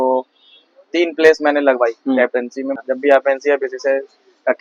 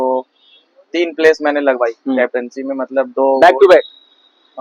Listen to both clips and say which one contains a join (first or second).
first